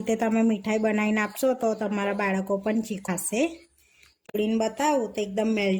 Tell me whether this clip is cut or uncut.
cut